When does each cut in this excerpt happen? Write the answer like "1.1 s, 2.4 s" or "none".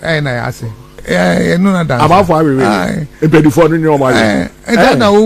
1.0 s